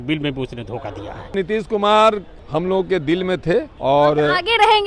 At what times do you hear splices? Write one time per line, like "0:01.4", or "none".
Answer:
0:01.3
0:02.3
0:03.7